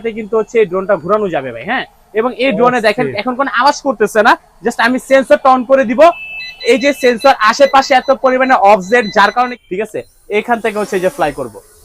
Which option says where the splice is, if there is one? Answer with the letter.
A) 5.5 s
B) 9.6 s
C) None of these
B